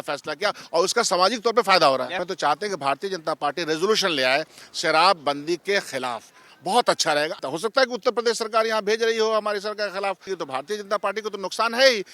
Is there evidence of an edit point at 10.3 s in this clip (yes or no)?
yes